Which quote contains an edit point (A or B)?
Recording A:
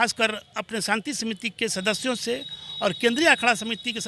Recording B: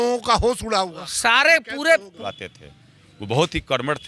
B